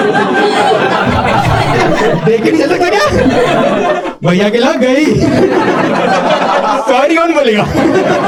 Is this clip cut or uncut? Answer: uncut